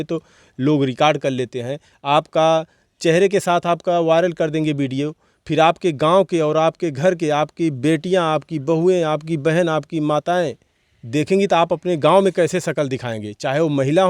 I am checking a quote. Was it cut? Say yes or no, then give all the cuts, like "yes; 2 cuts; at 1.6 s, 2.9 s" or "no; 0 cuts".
no; 0 cuts